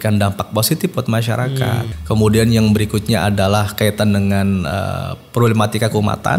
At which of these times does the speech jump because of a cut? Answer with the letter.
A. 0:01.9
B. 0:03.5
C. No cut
A